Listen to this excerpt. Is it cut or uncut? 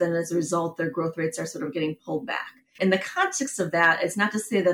uncut